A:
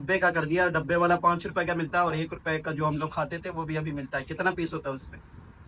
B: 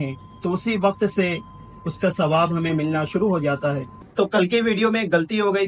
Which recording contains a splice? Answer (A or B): B